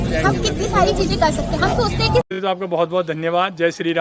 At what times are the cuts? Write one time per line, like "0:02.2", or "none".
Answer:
0:02.3